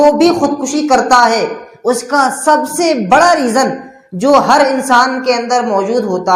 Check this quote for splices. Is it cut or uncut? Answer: uncut